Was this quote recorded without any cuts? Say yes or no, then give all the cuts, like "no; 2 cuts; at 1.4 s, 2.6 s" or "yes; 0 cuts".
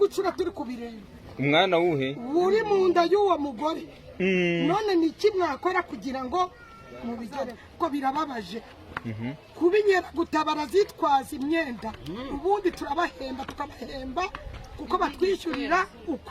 no; 1 cut; at 7.6 s